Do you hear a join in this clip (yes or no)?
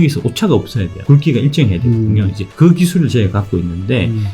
yes